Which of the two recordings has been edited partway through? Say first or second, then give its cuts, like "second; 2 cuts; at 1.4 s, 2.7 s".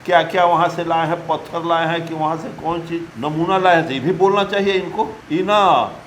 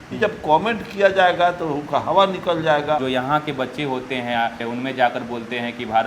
second; 1 cut; at 3.0 s